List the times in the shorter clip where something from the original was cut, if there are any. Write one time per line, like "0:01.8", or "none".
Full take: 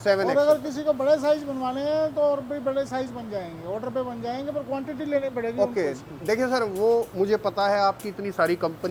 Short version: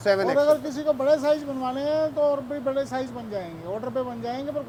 none